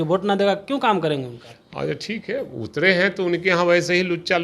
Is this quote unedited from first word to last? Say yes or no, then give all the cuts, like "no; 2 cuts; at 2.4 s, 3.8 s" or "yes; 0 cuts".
yes; 0 cuts